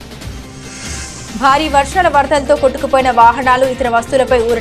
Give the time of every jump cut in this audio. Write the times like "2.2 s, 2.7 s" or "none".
1.0 s